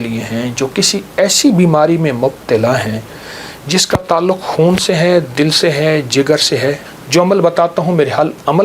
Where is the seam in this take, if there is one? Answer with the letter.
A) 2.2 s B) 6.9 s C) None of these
B